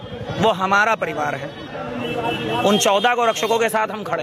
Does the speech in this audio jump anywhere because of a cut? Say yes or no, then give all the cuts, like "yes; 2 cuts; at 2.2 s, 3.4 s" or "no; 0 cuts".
no; 0 cuts